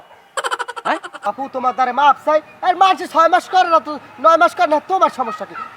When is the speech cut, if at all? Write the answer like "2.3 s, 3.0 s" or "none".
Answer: 1.2 s